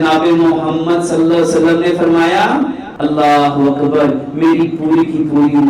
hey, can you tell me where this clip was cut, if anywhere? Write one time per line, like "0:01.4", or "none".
0:02.9